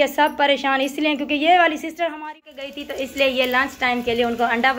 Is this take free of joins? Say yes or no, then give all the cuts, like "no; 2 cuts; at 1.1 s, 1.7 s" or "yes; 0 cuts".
no; 1 cut; at 2.2 s